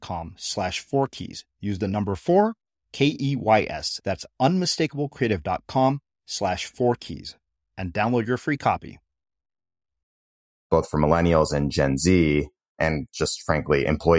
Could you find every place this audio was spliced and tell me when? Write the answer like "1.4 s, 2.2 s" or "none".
10.7 s, 12.7 s